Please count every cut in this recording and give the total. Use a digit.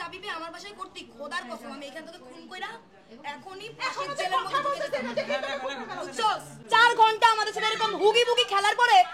1